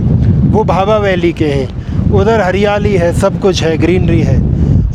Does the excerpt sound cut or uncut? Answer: uncut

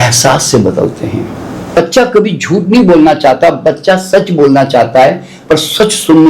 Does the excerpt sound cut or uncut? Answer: cut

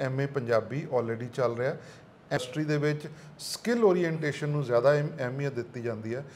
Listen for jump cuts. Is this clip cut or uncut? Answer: cut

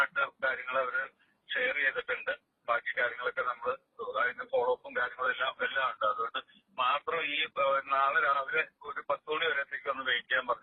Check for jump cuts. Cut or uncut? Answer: uncut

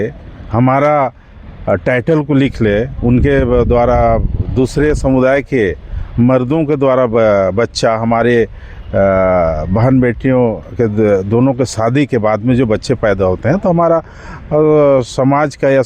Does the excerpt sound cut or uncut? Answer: uncut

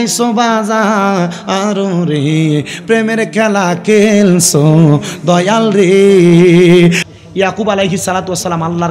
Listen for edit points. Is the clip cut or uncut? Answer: cut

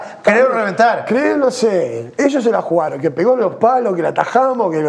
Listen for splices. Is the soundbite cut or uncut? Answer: uncut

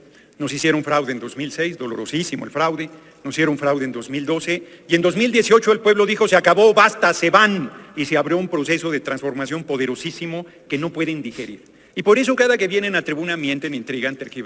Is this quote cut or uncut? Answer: uncut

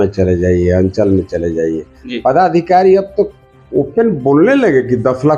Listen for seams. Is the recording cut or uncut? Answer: uncut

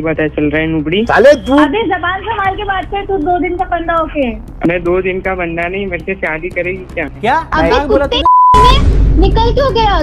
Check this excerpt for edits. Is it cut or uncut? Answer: uncut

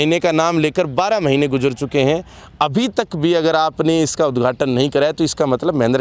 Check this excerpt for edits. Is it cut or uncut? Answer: uncut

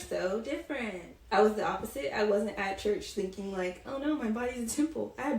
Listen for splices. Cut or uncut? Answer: cut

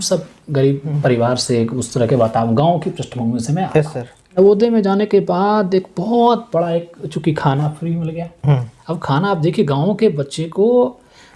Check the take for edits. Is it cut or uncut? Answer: cut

